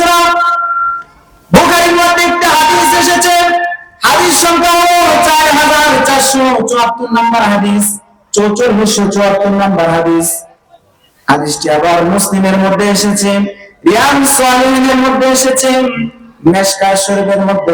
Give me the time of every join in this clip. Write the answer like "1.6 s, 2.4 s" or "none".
none